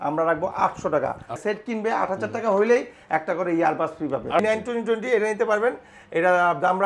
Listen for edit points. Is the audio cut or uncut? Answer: cut